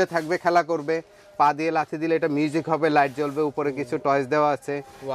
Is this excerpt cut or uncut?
uncut